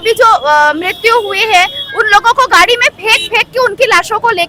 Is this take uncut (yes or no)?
yes